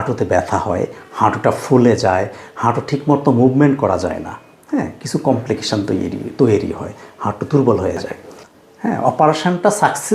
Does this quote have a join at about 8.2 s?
yes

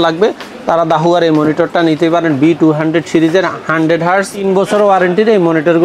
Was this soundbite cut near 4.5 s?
yes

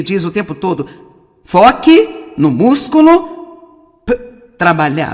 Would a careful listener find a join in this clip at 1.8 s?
yes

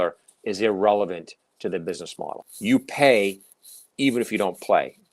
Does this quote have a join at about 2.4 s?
yes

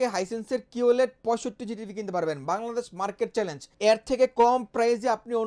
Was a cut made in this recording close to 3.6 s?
yes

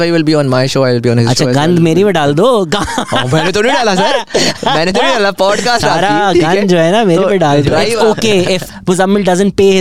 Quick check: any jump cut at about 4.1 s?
no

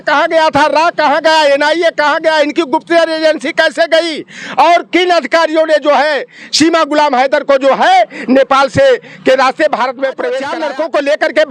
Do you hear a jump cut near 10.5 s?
yes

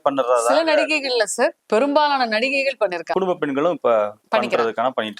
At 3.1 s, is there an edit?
yes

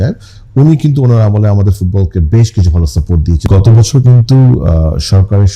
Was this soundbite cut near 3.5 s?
yes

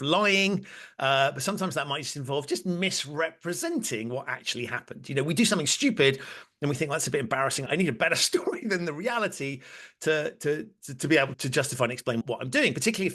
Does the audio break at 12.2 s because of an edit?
yes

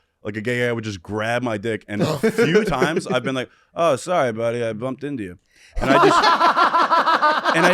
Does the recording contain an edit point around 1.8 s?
no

